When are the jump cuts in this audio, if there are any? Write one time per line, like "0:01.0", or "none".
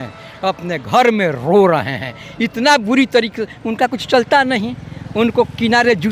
none